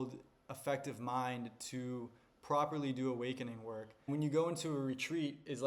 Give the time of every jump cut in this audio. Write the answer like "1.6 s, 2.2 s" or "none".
4.1 s